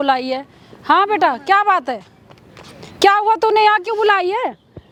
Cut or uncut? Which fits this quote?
uncut